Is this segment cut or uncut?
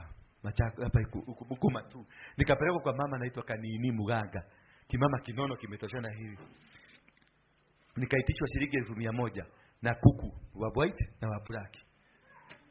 uncut